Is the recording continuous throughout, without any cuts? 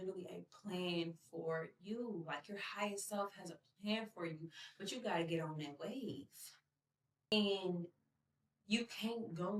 no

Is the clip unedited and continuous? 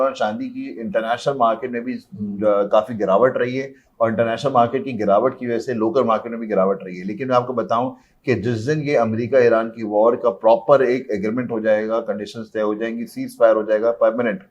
yes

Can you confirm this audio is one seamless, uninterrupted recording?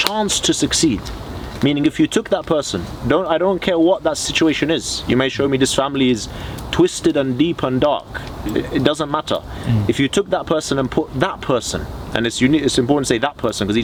yes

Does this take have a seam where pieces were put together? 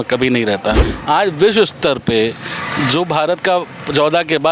yes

